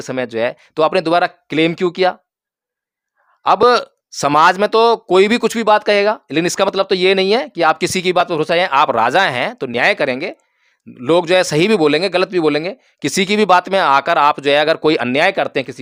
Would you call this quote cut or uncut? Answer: uncut